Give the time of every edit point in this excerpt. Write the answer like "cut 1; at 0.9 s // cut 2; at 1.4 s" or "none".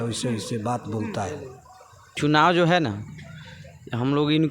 cut 1; at 2.2 s